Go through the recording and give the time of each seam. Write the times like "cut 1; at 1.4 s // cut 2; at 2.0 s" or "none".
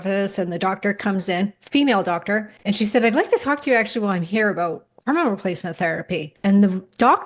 cut 1; at 2.5 s // cut 2; at 6.3 s